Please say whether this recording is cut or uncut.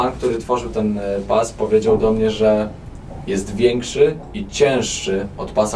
uncut